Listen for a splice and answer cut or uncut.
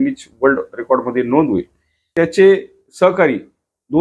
cut